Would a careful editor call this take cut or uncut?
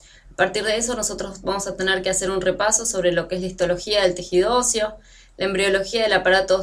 cut